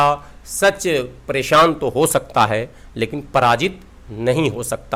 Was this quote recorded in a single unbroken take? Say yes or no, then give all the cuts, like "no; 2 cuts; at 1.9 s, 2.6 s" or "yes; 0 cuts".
yes; 0 cuts